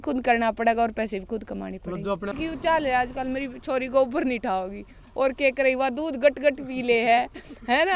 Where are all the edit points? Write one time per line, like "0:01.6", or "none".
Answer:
0:02.4